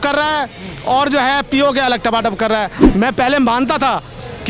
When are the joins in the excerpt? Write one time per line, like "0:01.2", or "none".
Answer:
0:02.8